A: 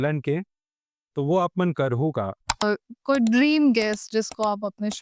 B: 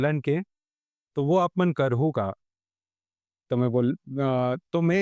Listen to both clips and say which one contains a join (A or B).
A